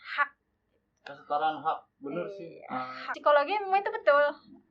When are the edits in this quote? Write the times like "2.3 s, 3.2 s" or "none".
3.1 s